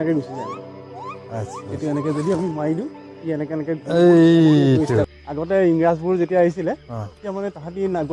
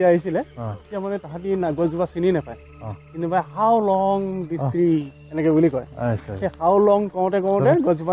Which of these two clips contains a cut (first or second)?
first